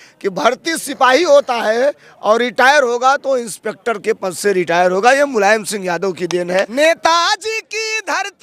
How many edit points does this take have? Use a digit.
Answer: 1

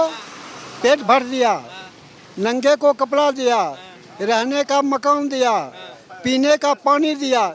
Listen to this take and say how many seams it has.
0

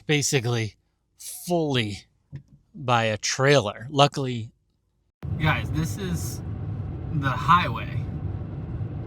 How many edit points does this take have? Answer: 1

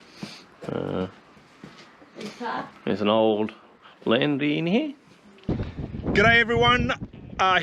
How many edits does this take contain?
1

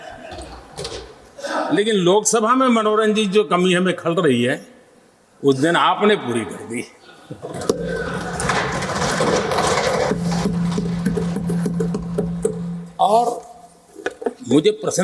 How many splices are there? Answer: 0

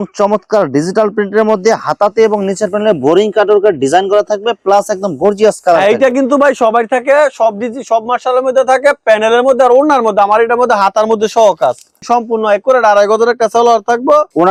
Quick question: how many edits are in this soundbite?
0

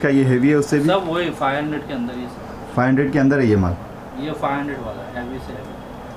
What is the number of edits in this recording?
0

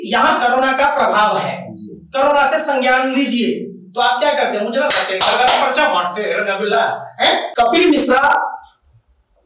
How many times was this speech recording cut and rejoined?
1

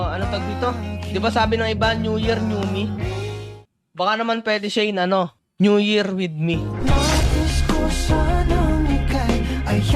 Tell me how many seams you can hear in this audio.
0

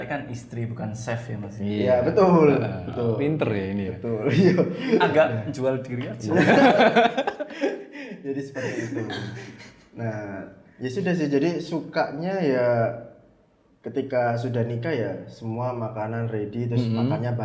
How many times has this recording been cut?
0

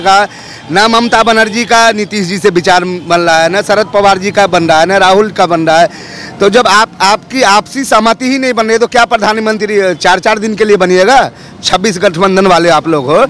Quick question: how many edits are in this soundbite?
0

